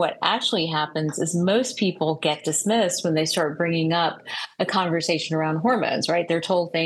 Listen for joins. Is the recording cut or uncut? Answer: uncut